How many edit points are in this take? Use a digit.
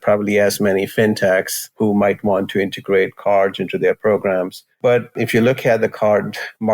2